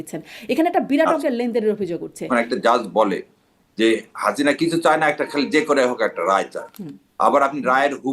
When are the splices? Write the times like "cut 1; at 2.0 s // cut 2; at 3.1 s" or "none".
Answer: cut 1; at 2.2 s

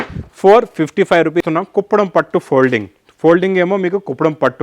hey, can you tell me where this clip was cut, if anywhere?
cut 1; at 1.5 s

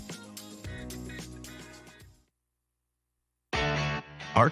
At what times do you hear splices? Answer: cut 1; at 2.8 s

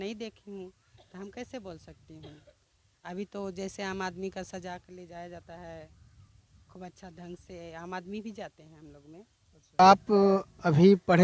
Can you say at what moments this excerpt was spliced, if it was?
cut 1; at 9.8 s

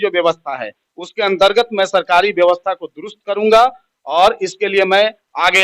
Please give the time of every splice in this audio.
none

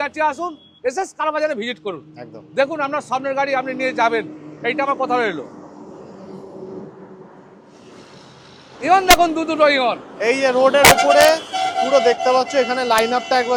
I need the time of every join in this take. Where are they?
none

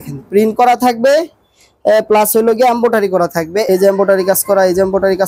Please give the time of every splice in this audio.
cut 1; at 3.6 s

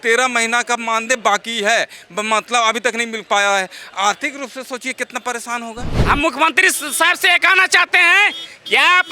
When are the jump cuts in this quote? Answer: cut 1; at 5.9 s

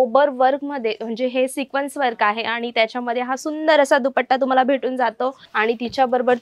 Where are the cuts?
cut 1; at 5.4 s

